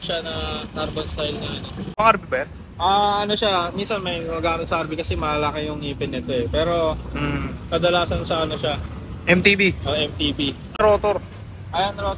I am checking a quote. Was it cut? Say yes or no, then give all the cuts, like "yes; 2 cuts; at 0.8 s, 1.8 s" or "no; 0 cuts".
yes; 2 cuts; at 2.0 s, 10.8 s